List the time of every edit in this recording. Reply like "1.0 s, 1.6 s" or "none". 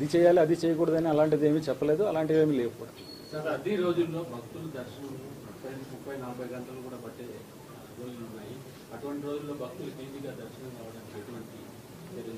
none